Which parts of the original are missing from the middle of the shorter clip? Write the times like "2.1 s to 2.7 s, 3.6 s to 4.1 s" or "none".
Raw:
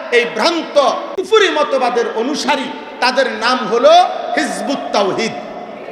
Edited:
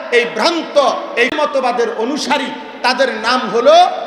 1.3 s to 1.5 s